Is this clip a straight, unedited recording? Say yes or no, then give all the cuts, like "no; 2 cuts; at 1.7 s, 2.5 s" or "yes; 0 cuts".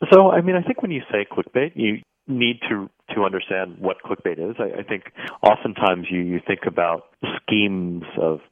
no; 1 cut; at 5.2 s